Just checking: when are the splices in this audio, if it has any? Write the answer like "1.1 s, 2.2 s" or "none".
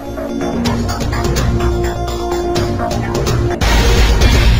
none